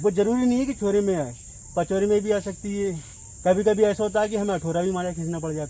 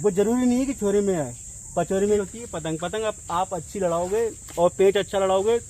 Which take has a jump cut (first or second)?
second